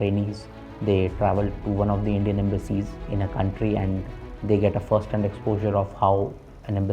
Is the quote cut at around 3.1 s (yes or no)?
yes